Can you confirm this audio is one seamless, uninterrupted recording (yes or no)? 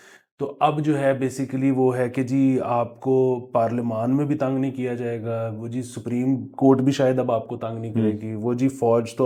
yes